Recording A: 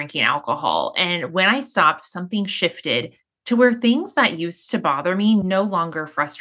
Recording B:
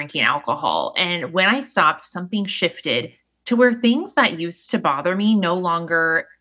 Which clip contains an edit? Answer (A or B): A